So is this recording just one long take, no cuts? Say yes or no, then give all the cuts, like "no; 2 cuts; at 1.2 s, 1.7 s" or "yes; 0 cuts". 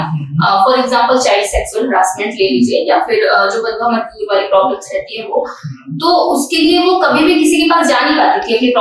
yes; 0 cuts